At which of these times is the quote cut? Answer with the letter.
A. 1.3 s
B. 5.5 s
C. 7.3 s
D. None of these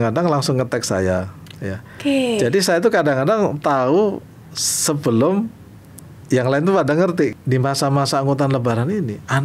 C